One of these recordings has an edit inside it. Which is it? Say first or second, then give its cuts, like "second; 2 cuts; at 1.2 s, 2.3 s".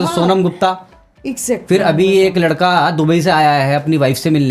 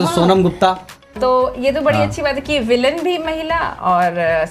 second; 1 cut; at 1.1 s